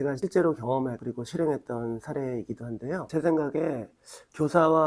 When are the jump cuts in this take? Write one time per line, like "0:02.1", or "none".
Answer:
0:03.0